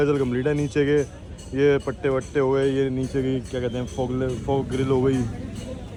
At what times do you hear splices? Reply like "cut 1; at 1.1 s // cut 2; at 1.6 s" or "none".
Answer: none